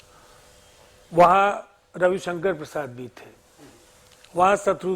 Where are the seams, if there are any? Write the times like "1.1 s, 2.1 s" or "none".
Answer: none